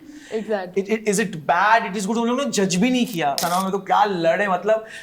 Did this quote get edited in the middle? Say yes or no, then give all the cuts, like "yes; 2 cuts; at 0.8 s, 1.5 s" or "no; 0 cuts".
yes; 1 cut; at 3.4 s